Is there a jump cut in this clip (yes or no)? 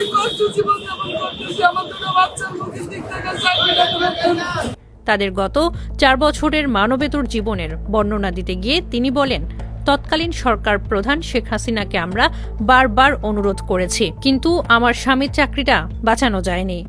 no